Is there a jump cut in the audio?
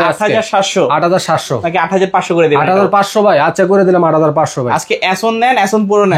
no; 0 cuts

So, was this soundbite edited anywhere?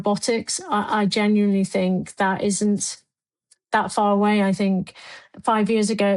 no; 0 cuts

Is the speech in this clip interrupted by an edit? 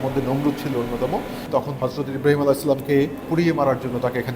yes; 2 cuts; at 1.7 s, 3.2 s

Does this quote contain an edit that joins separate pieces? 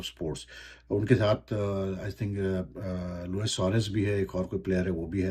no; 0 cuts

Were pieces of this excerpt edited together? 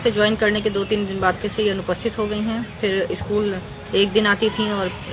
no; 0 cuts

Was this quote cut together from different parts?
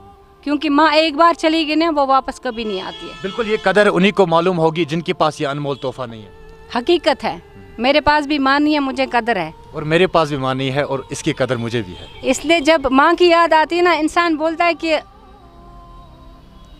no; 0 cuts

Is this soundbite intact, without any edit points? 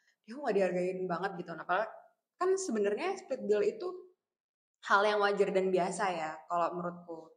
yes; 0 cuts

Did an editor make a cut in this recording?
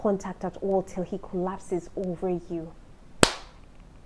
no; 0 cuts

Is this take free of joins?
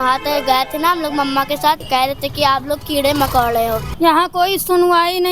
no; 2 cuts; at 1.8 s, 3.9 s

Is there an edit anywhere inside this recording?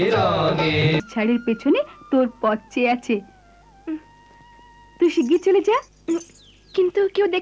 yes; 2 cuts; at 1.0 s, 5.9 s

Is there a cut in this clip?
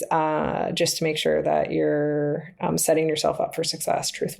no; 0 cuts

